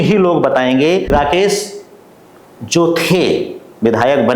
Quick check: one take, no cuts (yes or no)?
no